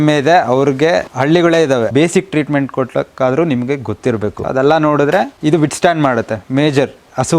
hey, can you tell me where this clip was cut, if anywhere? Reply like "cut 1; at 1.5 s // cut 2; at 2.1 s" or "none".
cut 1; at 1.1 s // cut 2; at 1.9 s // cut 3; at 4.4 s // cut 4; at 5.3 s // cut 5; at 6.4 s